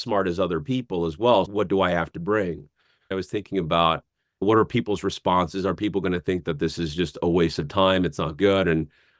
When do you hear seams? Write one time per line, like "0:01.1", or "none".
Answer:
0:01.5
0:03.1